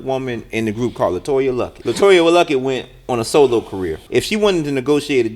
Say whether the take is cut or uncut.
cut